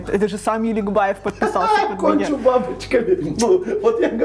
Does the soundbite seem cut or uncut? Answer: uncut